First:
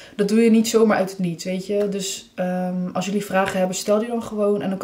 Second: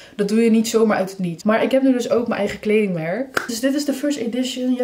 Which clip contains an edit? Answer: second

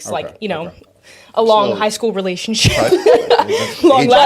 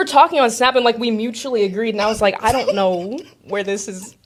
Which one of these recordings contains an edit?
first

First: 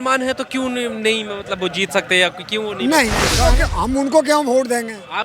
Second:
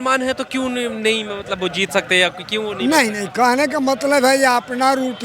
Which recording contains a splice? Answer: first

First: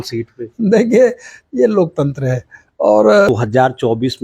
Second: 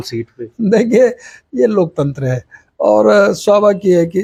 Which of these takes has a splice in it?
first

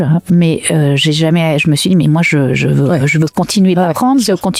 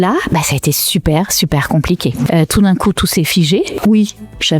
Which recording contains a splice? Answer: second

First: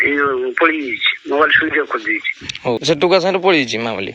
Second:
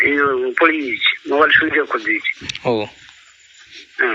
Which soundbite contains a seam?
first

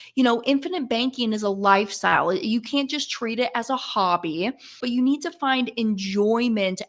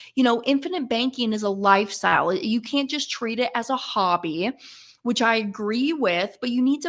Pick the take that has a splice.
first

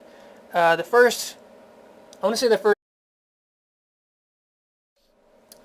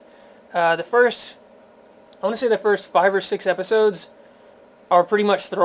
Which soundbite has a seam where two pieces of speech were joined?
second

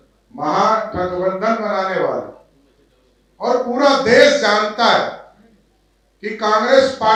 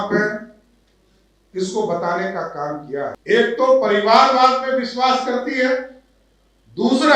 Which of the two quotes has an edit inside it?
second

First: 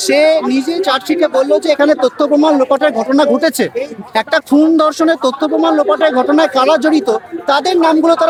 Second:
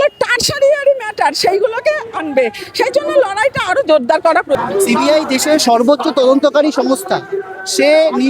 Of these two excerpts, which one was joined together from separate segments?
second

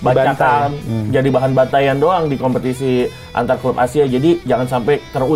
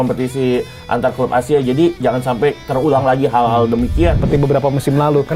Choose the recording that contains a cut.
second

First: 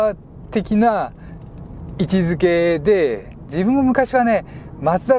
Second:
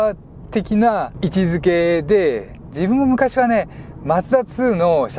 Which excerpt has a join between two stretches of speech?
second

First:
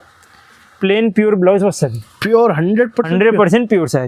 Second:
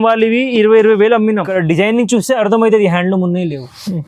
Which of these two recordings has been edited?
second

